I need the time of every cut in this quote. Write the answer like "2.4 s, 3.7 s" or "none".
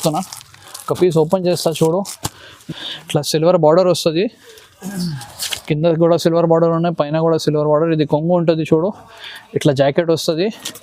2.5 s